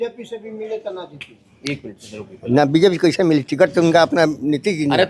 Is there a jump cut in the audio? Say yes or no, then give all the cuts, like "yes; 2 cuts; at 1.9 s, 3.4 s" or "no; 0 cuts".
no; 0 cuts